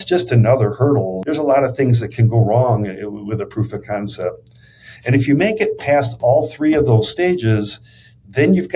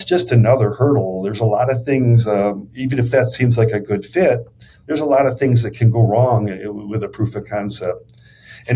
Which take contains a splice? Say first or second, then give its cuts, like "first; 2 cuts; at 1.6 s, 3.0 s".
first; 1 cut; at 1.2 s